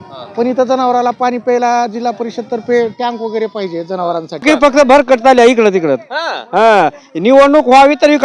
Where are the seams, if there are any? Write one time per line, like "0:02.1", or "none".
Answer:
0:04.4